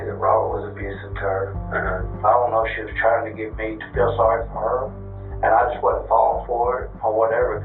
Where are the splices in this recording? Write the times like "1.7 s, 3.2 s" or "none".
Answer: none